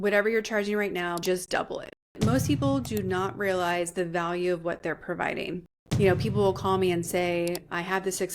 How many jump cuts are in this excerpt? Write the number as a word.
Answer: three